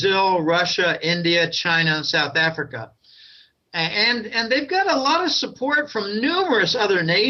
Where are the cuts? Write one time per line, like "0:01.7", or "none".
0:06.2